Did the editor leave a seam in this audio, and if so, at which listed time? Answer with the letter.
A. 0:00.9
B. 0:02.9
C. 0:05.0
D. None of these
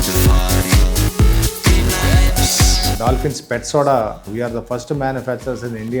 B